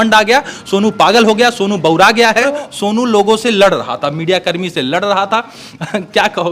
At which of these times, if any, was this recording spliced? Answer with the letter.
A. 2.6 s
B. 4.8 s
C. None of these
A